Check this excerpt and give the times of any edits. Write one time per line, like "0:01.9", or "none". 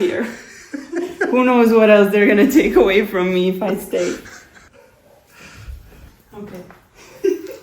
0:04.6
0:06.1

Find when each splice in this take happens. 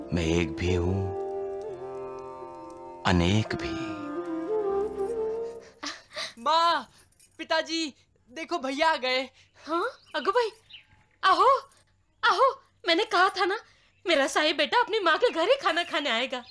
0:05.6

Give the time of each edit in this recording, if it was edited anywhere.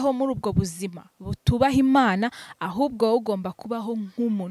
none

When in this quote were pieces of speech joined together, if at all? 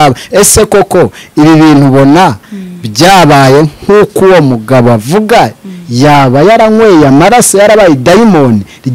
none

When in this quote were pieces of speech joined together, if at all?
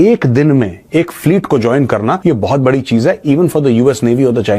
0:02.2

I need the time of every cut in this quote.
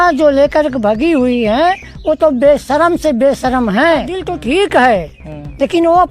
0:04.3

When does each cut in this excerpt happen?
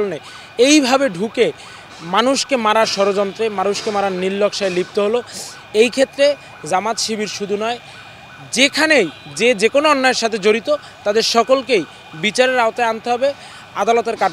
none

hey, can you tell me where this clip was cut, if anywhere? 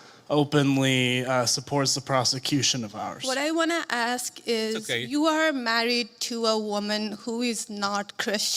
0:03.2

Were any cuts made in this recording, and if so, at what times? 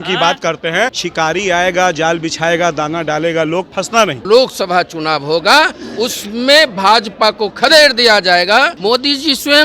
0:01.0
0:04.2
0:08.7

